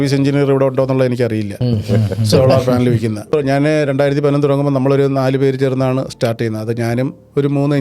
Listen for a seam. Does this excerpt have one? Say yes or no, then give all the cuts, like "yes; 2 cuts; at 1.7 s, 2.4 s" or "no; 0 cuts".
yes; 1 cut; at 3.3 s